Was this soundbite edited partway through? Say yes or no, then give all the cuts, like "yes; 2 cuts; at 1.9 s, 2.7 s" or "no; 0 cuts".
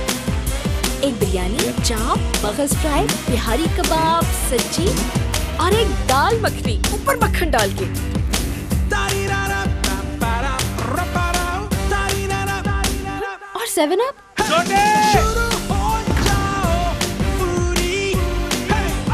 no; 0 cuts